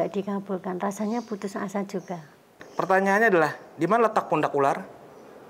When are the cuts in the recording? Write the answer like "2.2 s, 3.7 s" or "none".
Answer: 2.6 s